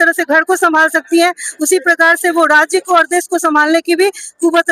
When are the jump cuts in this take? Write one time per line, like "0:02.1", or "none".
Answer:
none